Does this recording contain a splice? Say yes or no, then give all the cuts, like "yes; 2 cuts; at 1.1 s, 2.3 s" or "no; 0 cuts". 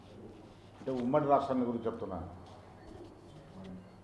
no; 0 cuts